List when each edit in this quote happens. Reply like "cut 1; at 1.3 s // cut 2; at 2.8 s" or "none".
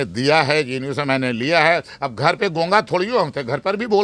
none